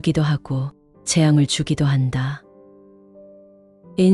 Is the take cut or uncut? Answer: uncut